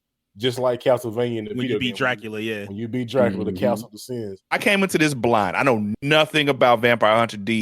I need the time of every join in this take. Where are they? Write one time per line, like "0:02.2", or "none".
0:04.6